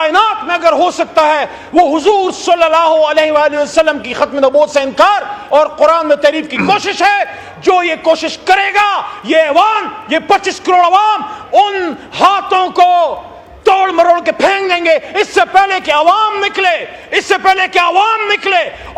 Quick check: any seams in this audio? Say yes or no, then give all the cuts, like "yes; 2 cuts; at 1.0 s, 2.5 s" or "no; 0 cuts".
no; 0 cuts